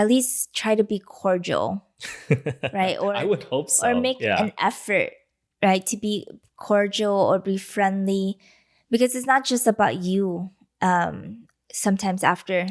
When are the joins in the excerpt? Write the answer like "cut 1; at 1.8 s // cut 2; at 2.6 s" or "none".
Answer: none